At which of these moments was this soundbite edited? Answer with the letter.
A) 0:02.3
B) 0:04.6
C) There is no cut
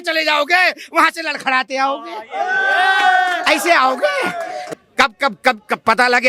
B